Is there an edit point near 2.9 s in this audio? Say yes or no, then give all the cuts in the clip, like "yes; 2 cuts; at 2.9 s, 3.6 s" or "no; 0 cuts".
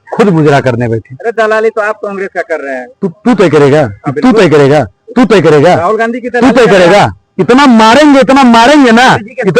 yes; 1 cut; at 2.9 s